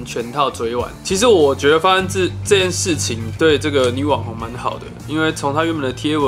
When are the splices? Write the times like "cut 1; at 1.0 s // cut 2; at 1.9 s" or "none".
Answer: cut 1; at 0.9 s